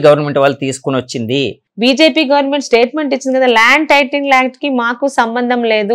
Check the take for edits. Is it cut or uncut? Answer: cut